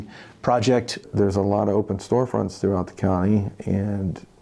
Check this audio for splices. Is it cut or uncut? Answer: cut